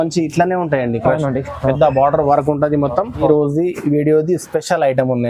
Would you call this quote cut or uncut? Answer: cut